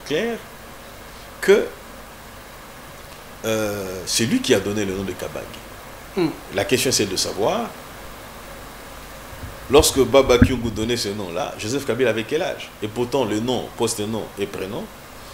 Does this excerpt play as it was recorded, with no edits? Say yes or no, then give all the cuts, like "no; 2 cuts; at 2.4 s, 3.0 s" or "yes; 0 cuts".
yes; 0 cuts